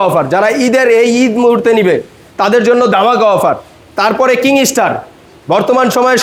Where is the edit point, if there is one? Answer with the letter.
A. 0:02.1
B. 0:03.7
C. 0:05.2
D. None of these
D